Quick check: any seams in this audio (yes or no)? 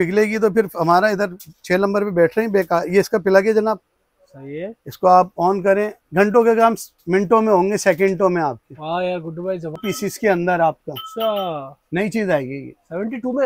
yes